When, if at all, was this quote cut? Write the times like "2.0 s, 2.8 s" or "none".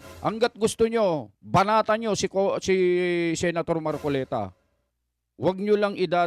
none